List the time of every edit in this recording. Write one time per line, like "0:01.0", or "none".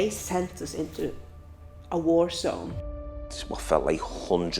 0:03.1